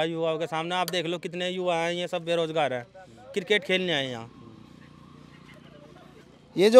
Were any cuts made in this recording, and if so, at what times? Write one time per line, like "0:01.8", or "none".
none